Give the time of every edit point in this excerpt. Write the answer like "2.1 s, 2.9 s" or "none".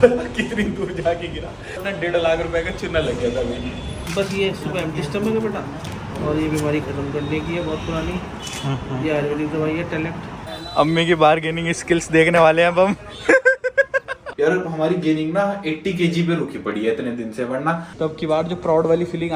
1.8 s, 4.0 s, 10.3 s, 14.3 s, 17.9 s